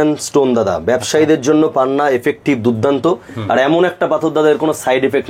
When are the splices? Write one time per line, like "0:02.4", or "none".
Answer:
none